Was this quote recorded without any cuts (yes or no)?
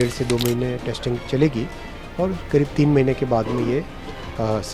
yes